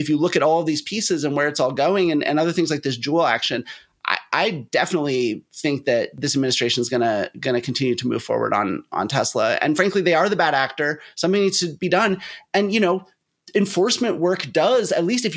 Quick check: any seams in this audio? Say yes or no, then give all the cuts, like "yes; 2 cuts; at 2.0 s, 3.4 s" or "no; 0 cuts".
yes; 1 cut; at 6.2 s